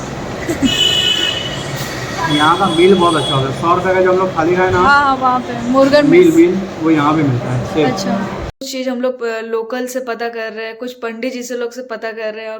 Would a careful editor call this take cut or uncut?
cut